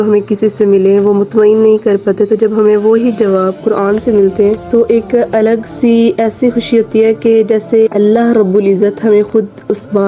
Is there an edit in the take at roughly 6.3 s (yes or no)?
no